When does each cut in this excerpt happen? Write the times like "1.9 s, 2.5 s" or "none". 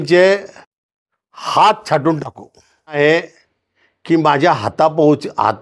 3.0 s

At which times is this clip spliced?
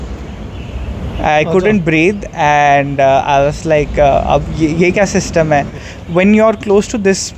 5.7 s

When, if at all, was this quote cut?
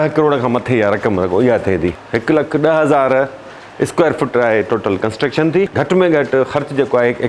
2.1 s, 5.7 s

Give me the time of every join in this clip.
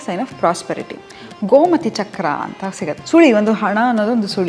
2.9 s

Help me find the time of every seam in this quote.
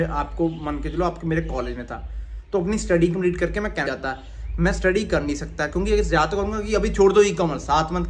3.8 s

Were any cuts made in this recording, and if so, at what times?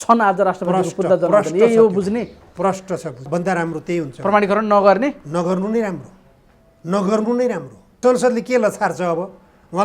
3.2 s, 8.0 s

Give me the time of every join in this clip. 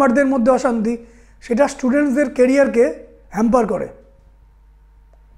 none

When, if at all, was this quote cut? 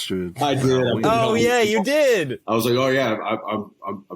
2.4 s

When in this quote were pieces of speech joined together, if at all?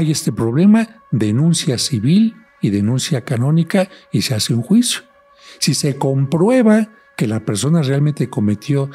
none

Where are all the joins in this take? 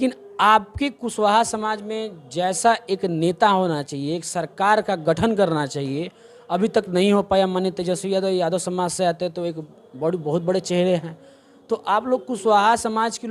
none

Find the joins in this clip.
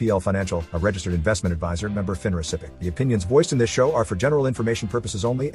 2.8 s

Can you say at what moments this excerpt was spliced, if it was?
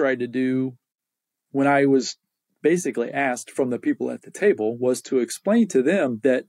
none

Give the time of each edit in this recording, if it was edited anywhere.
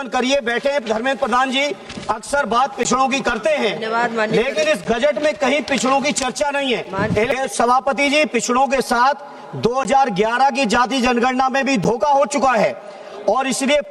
7.3 s

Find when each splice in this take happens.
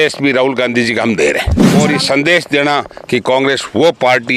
1.6 s

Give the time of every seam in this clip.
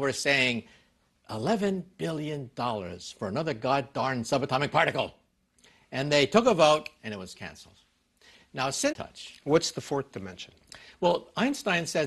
none

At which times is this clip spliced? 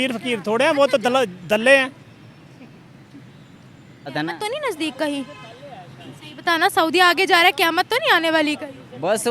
4.1 s

